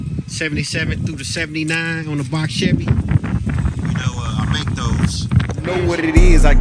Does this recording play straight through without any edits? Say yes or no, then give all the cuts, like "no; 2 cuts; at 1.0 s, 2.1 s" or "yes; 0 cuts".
no; 1 cut; at 5.6 s